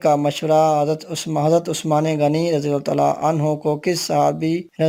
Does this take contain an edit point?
no; 0 cuts

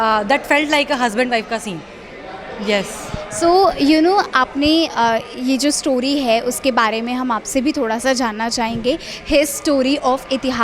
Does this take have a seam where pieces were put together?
no; 0 cuts

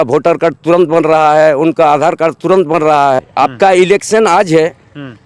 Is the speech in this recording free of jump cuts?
no; 1 cut; at 3.3 s

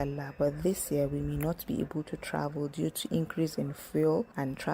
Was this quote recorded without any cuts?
yes; 0 cuts

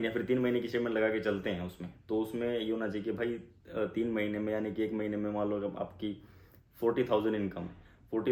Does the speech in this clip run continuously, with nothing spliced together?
yes; 0 cuts

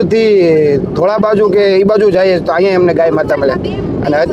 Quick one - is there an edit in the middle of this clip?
no; 0 cuts

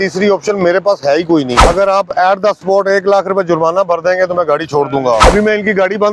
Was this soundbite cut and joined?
yes; 2 cuts; at 1.6 s, 5.2 s

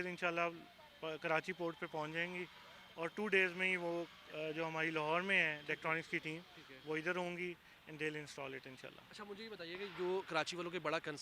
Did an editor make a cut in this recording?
no; 0 cuts

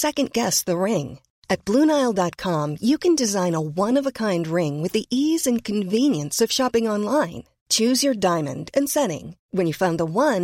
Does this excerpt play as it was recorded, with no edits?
yes; 0 cuts

